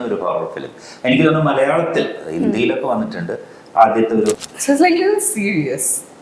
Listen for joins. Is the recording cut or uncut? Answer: cut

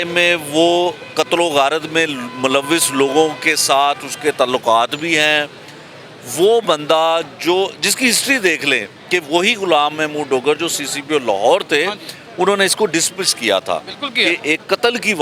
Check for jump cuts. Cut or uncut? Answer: uncut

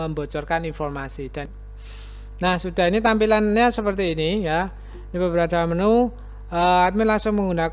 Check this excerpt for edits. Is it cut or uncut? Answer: cut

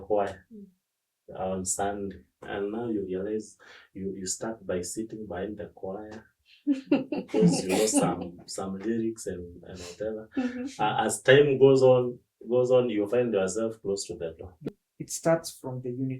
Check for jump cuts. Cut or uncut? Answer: cut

